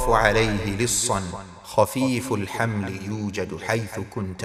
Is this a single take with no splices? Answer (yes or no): yes